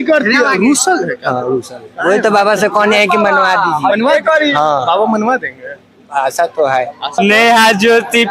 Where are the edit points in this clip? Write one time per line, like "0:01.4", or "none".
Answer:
0:07.2